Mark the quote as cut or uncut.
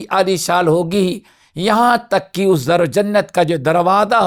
uncut